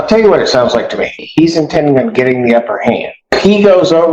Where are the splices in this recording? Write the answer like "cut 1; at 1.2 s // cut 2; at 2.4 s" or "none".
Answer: cut 1; at 1.2 s // cut 2; at 3.4 s